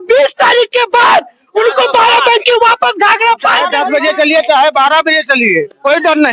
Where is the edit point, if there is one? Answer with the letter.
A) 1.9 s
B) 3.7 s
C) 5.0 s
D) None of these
B